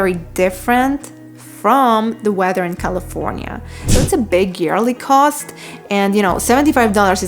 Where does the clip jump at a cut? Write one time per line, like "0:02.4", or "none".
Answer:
0:03.9